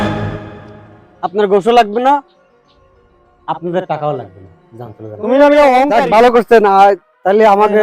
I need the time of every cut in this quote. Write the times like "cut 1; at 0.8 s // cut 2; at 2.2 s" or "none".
cut 1; at 5.9 s